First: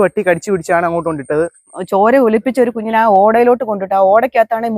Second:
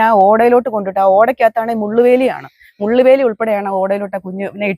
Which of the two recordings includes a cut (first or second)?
first